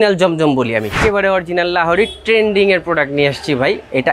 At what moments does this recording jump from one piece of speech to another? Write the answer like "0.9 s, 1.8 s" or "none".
0.9 s